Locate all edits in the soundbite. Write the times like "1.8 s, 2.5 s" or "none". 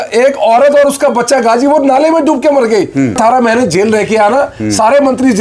3.2 s